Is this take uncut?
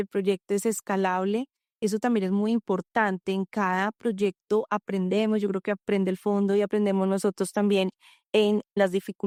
yes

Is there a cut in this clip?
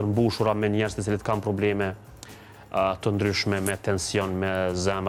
no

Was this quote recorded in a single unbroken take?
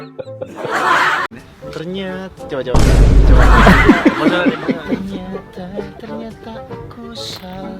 no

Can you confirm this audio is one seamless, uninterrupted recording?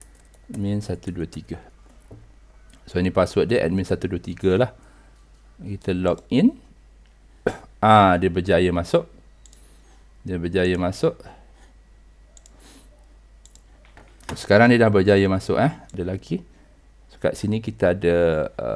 no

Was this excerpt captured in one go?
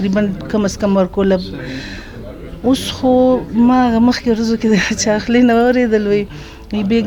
yes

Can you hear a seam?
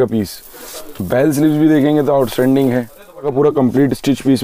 yes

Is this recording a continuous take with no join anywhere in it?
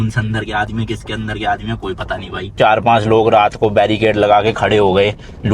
no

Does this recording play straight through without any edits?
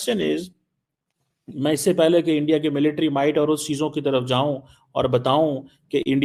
yes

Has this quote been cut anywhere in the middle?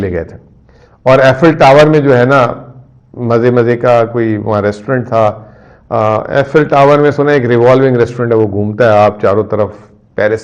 no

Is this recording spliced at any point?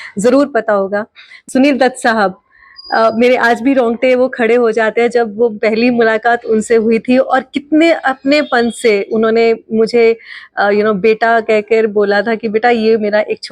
yes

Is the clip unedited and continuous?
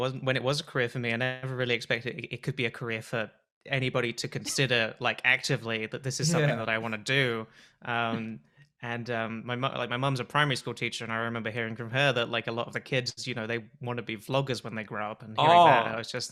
yes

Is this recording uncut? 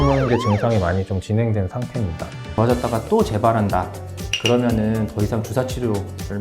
no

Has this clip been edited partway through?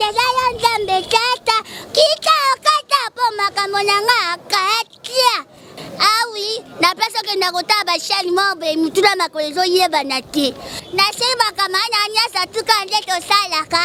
no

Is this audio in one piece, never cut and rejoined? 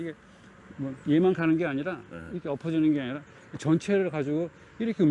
yes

